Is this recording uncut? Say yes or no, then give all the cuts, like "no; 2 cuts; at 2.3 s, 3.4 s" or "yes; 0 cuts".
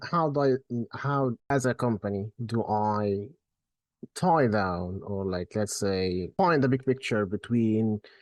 no; 2 cuts; at 1.4 s, 6.3 s